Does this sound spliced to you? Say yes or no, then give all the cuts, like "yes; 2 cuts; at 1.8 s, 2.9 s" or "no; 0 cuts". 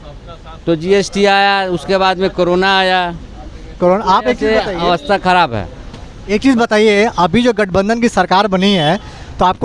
no; 0 cuts